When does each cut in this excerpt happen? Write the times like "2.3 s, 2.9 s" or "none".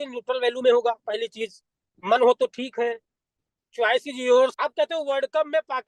4.5 s